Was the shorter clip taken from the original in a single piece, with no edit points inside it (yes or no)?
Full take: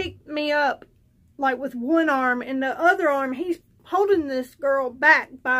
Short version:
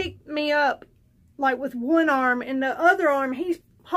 yes